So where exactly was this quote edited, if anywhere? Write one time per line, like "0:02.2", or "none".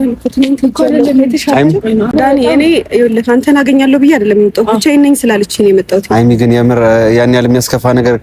0:02.1